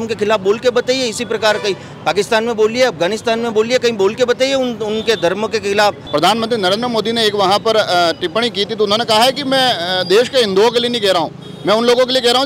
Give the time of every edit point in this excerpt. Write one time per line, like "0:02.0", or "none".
0:06.0